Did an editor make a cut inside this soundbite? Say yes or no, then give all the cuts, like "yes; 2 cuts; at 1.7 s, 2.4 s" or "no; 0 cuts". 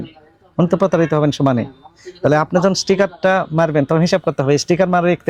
no; 0 cuts